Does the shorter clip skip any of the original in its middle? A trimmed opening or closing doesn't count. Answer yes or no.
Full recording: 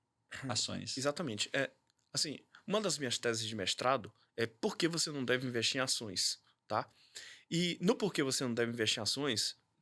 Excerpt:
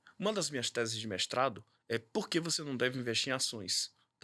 no